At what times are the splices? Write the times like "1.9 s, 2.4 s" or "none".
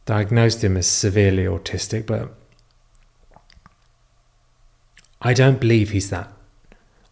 none